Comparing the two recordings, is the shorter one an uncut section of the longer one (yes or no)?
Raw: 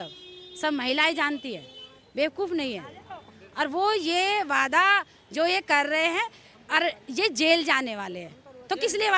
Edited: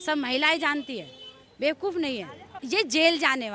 no